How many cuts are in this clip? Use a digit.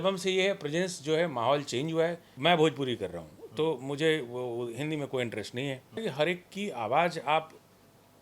2